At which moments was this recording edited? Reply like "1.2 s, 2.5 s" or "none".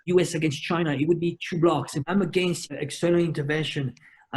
2.0 s